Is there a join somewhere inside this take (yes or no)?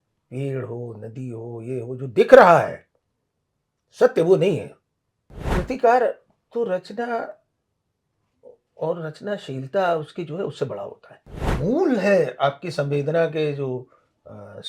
yes